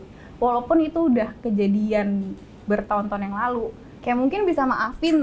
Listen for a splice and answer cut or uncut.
cut